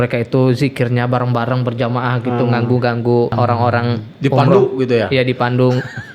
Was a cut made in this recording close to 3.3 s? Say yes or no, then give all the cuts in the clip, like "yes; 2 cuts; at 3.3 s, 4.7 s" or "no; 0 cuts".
yes; 1 cut; at 3.3 s